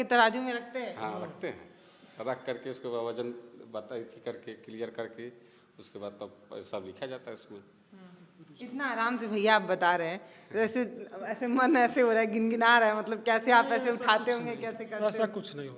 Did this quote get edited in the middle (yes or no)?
no